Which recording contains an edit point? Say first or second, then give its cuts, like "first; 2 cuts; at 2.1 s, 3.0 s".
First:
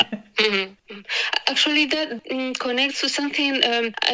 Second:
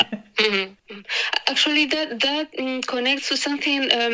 first; 1 cut; at 2.2 s